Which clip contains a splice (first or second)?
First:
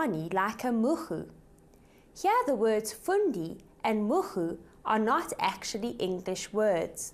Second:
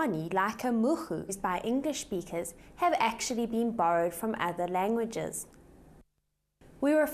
first